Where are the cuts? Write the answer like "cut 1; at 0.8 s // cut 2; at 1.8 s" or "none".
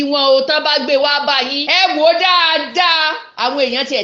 cut 1; at 1.6 s